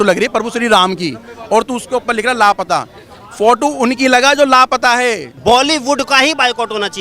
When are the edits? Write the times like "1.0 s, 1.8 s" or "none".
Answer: 5.3 s